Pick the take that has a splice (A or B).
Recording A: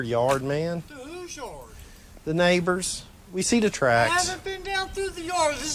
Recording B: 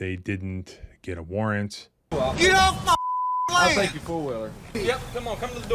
B